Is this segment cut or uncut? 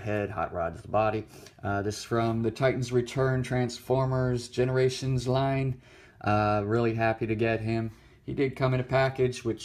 uncut